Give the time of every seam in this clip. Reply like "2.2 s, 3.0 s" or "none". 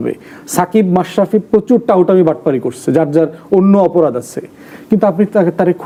none